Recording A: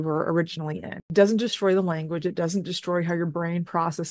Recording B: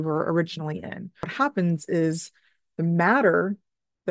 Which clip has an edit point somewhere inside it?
A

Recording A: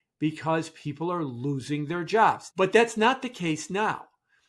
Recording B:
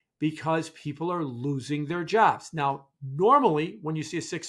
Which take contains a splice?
A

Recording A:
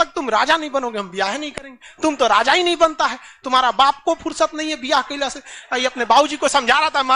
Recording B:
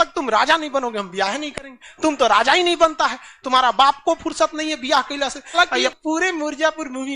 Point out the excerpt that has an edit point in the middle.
B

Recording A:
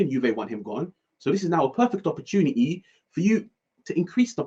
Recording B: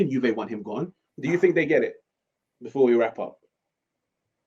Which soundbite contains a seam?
B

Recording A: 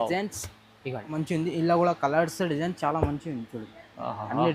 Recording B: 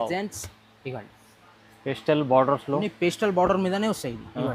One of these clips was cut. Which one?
A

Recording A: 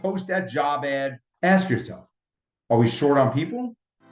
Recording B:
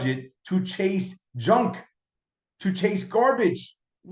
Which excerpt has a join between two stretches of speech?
A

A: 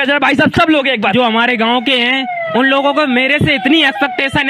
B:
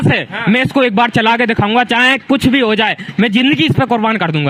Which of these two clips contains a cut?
A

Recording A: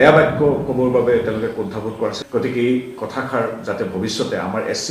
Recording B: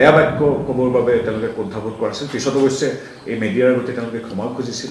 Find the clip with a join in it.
A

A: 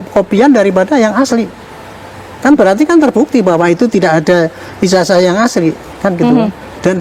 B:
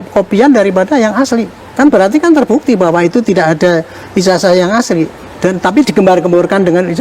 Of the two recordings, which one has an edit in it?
B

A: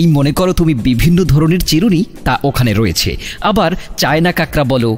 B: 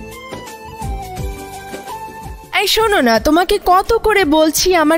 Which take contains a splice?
B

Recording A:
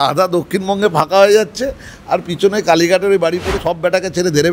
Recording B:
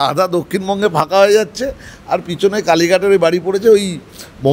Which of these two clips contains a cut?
A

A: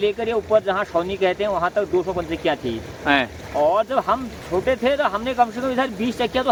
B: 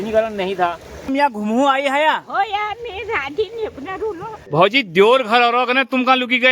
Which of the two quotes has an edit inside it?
B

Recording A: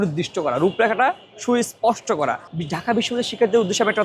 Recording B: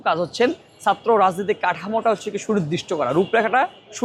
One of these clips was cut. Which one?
A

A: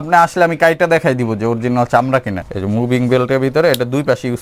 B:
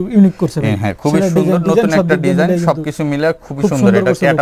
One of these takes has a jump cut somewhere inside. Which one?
A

